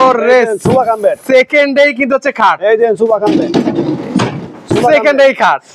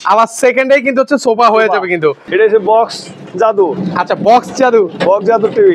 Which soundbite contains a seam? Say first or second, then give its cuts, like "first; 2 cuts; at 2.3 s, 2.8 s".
second; 1 cut; at 2.2 s